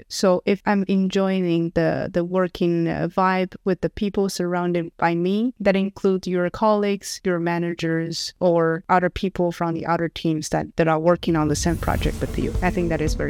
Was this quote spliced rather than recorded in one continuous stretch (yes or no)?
no